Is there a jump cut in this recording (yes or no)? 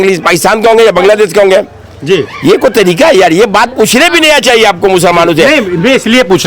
no